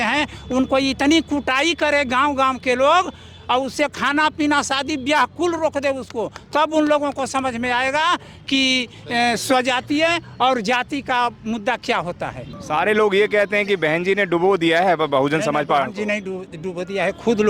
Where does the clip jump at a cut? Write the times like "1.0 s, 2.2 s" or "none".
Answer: 12.5 s